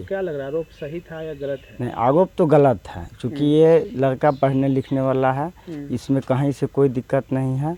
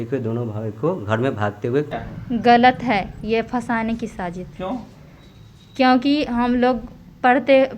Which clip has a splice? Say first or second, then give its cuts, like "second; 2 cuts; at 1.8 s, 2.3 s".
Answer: second; 1 cut; at 2.0 s